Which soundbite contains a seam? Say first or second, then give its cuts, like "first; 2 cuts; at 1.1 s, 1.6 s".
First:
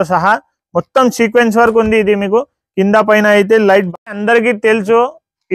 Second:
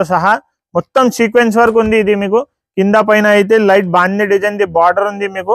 first; 1 cut; at 3.9 s